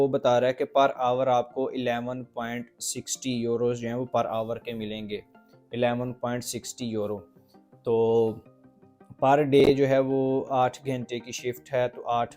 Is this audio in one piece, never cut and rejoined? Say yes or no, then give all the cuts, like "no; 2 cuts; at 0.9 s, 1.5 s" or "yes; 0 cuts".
yes; 0 cuts